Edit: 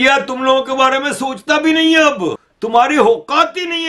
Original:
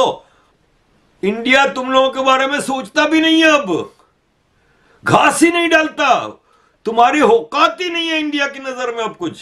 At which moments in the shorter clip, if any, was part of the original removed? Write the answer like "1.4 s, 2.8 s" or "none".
2.5 s